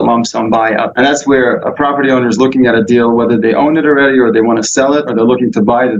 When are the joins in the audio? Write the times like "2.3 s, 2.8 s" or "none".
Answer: 0.9 s, 5.1 s